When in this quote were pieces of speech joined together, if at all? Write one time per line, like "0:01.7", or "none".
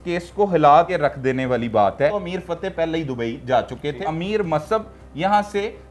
0:00.9
0:02.1
0:04.1